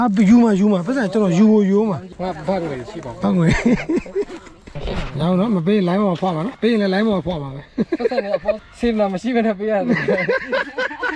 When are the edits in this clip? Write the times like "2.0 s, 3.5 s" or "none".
2.1 s, 6.5 s, 8.6 s